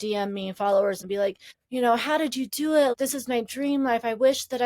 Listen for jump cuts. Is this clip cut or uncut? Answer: cut